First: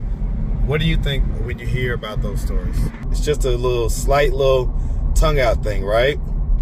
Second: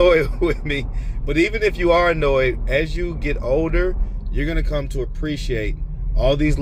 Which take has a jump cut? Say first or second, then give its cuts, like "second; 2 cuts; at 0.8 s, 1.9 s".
first; 1 cut; at 3.1 s